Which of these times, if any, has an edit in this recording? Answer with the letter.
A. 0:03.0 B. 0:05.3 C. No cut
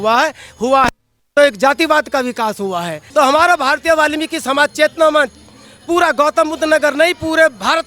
A